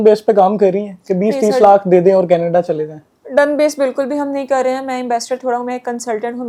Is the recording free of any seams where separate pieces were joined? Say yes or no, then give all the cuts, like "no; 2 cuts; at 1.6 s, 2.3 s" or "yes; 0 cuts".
yes; 0 cuts